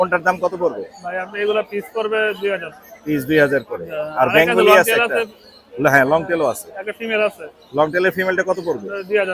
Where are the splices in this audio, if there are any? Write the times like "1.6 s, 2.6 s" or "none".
none